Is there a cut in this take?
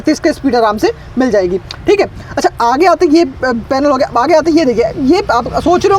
no; 0 cuts

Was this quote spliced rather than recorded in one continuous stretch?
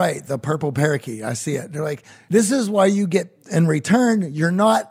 yes; 1 cut; at 2.1 s

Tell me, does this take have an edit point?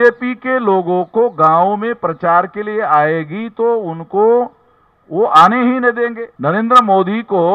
yes; 1 cut; at 6.3 s

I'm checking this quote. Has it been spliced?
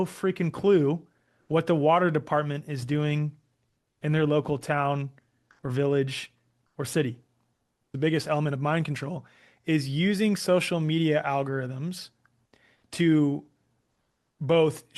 yes; 1 cut; at 7.9 s

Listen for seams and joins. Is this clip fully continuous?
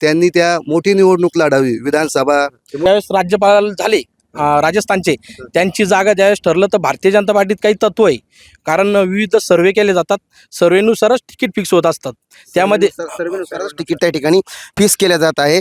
no; 1 cut; at 2.8 s

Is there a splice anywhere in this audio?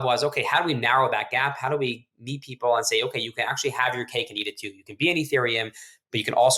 no; 0 cuts

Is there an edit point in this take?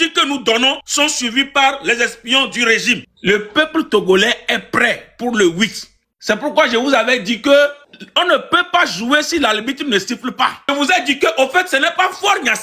yes; 3 cuts; at 0.8 s, 3.1 s, 10.7 s

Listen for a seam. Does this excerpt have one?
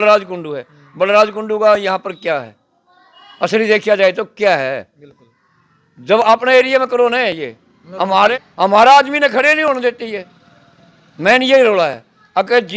no; 0 cuts

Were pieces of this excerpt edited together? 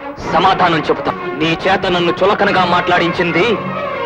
yes; 1 cut; at 1.1 s

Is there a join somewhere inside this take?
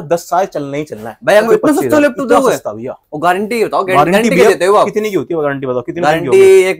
yes; 1 cut; at 1.5 s

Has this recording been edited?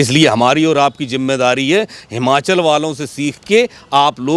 no; 0 cuts

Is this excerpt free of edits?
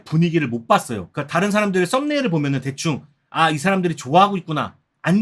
no; 1 cut; at 1.0 s

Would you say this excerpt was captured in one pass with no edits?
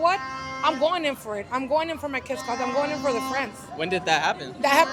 yes; 0 cuts

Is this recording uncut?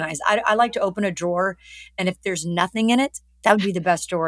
no; 1 cut; at 3.2 s

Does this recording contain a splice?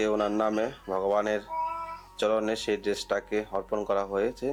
no; 0 cuts

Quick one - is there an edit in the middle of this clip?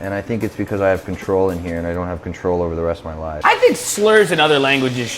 yes; 1 cut; at 3.4 s

